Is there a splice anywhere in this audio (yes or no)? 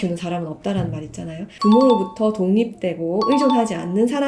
yes